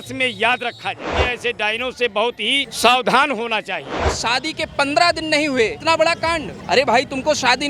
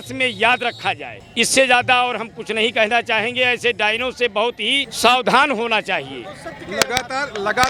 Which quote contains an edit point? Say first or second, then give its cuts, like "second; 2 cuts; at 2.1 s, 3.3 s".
first; 3 cuts; at 1.2 s, 4.0 s, 5.8 s